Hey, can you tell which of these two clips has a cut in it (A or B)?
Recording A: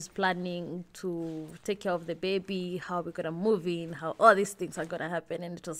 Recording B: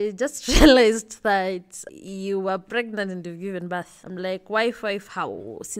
B